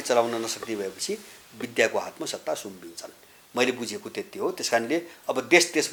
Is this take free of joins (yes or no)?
yes